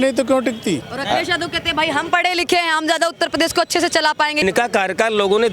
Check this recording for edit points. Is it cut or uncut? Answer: cut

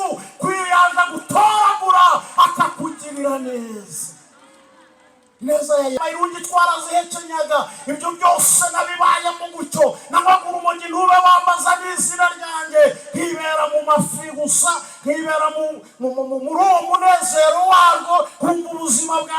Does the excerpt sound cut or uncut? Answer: cut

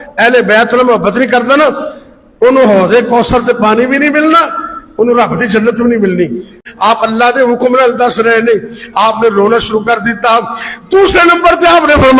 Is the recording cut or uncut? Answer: cut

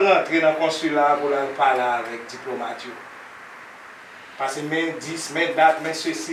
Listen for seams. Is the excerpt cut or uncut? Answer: uncut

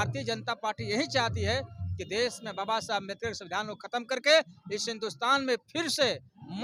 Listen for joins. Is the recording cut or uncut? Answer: uncut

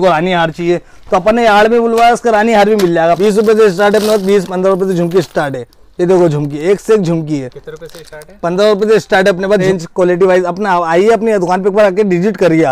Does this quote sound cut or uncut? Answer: cut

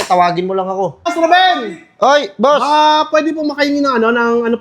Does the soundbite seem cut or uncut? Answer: cut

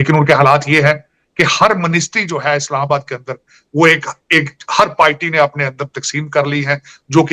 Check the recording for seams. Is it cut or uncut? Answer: uncut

